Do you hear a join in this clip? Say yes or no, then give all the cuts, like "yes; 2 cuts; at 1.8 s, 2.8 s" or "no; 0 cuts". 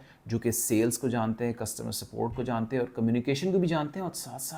no; 0 cuts